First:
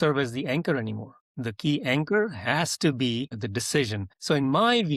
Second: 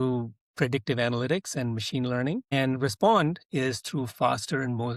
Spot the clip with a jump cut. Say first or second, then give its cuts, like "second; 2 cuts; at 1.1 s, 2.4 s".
first; 1 cut; at 4.1 s